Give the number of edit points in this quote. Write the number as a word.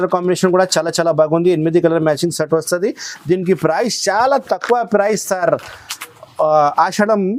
zero